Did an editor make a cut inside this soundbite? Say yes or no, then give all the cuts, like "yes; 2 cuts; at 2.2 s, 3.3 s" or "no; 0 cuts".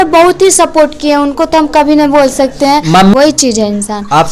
yes; 1 cut; at 3.1 s